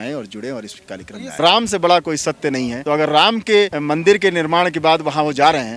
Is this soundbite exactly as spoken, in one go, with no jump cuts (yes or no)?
no